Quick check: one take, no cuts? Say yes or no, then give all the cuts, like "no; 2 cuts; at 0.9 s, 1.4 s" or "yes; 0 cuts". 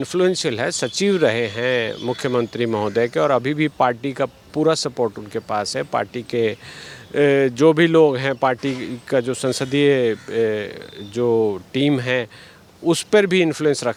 yes; 0 cuts